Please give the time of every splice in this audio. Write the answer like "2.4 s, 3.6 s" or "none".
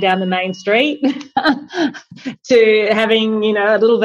none